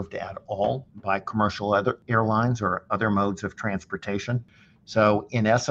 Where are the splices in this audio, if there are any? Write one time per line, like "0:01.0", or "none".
0:00.9
0:02.0
0:04.4